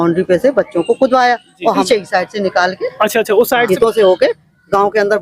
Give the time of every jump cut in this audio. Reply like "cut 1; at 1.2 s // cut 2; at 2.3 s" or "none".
cut 1; at 1.9 s // cut 2; at 3.7 s